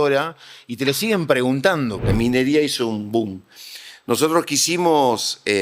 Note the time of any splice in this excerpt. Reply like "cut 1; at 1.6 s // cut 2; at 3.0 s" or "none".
cut 1; at 2.1 s